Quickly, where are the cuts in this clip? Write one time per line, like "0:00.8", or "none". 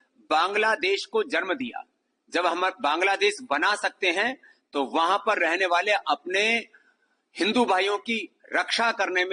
none